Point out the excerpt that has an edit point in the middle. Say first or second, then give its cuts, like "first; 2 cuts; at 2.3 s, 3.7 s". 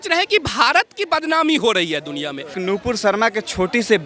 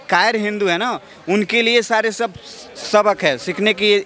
first; 1 cut; at 2.5 s